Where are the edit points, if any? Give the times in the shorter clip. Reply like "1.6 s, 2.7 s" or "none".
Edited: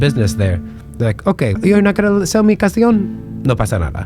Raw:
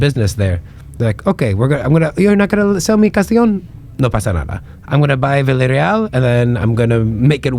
1.6 s

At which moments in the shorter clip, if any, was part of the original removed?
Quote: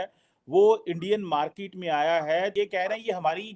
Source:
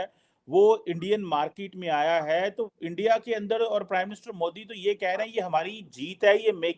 2.5 s

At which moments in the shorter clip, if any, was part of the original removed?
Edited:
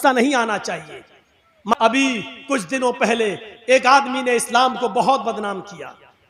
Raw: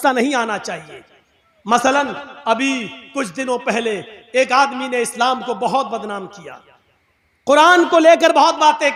1.7 s

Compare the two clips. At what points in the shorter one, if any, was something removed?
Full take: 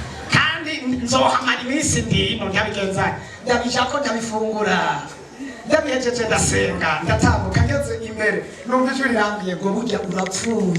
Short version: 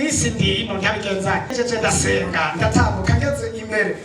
1.5 s

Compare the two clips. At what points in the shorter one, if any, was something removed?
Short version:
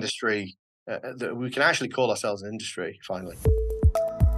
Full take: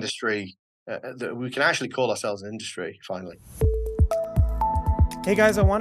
3.3 s

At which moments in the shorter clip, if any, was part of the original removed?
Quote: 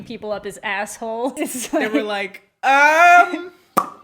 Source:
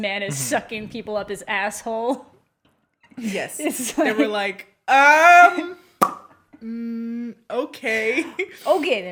1.3 s

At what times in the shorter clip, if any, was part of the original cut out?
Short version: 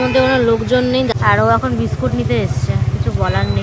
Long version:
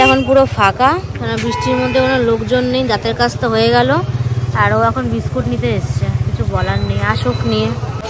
1.1 s

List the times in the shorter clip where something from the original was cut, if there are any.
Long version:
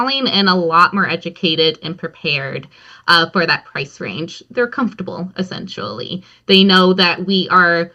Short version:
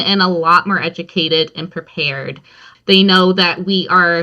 2.6 s

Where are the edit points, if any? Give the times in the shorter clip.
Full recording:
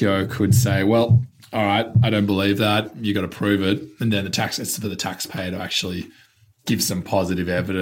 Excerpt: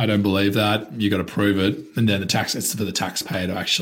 none

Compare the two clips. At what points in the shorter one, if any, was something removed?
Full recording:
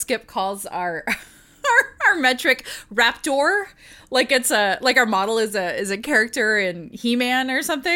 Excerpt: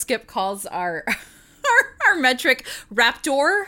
none

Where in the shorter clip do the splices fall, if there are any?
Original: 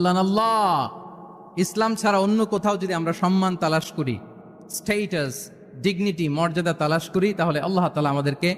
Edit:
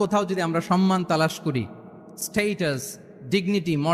none

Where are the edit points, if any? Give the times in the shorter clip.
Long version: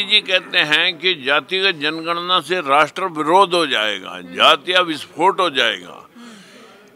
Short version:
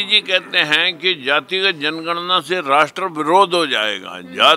none

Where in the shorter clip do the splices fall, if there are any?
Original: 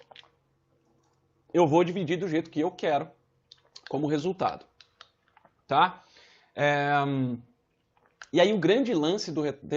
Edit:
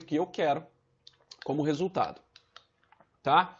none

